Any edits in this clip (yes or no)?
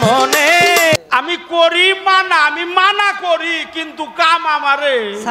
yes